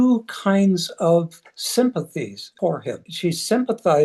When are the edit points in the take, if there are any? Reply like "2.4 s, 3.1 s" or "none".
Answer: 2.4 s, 3.1 s